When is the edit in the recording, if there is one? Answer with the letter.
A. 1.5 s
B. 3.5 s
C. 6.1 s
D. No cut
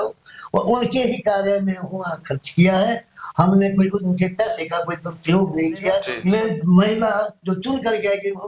C